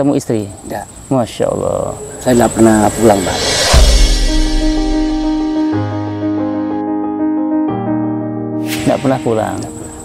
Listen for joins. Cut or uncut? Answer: uncut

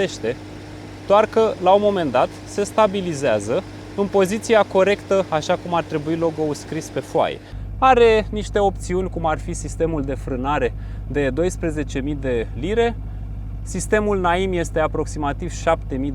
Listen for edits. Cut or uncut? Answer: cut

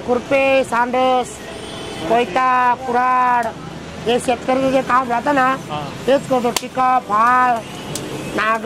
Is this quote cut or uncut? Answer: uncut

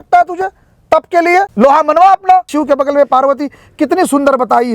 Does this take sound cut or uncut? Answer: cut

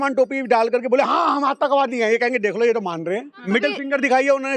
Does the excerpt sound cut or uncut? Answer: cut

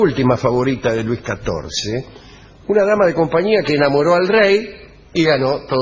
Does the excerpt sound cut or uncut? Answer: uncut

